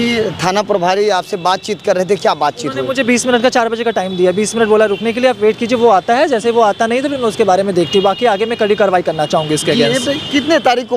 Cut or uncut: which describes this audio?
uncut